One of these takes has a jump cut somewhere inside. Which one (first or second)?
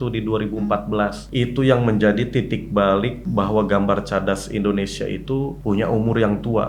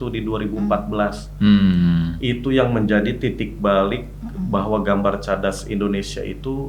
first